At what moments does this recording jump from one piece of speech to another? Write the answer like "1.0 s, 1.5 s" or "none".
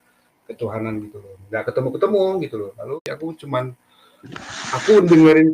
3.0 s